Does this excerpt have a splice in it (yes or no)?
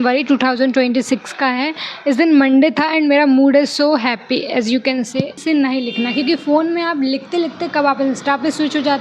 yes